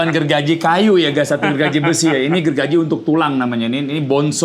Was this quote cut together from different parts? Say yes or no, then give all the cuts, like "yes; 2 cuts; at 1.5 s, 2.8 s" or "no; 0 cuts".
no; 0 cuts